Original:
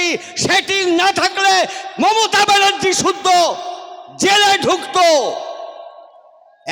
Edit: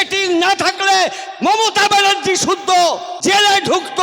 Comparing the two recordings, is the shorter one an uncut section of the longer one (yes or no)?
no